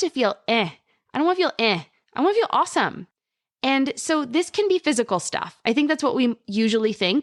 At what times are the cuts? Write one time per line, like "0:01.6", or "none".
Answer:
none